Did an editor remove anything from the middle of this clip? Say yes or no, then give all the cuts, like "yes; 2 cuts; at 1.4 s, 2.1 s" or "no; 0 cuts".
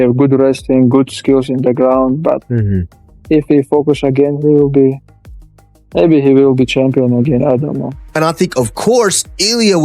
yes; 1 cut; at 8.0 s